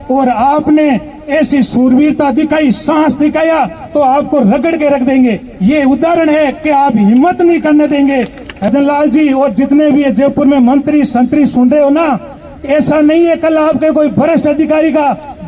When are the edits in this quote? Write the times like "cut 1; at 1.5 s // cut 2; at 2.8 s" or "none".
cut 1; at 8.7 s